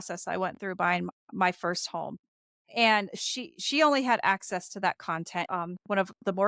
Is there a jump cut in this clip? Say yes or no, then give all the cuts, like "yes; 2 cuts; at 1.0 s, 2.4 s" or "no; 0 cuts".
yes; 1 cut; at 5.5 s